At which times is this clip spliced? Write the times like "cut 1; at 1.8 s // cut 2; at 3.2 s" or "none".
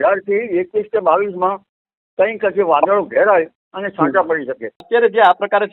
cut 1; at 4.8 s